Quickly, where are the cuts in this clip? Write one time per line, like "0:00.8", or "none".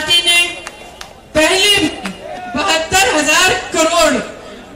0:02.3